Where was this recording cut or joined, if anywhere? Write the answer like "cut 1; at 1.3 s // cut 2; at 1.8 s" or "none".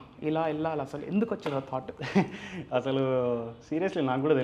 none